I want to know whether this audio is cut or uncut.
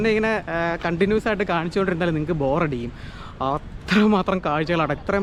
uncut